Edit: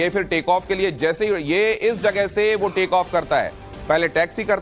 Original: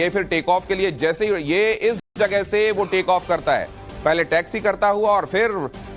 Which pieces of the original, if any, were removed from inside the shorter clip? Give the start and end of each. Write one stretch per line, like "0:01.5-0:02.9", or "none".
0:02.0-0:02.1